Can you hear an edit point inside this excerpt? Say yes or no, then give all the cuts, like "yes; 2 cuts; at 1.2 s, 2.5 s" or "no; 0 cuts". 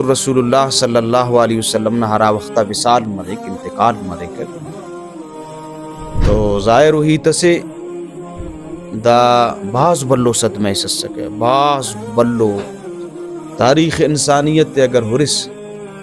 yes; 2 cuts; at 4.4 s, 6.2 s